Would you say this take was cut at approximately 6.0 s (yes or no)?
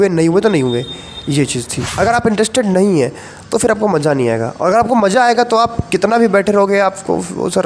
no